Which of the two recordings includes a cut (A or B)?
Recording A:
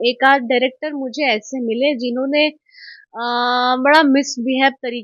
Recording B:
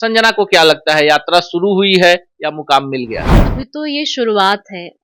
B